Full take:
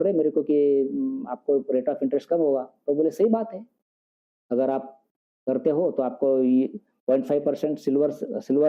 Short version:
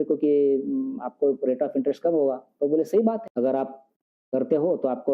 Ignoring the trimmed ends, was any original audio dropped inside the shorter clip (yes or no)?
yes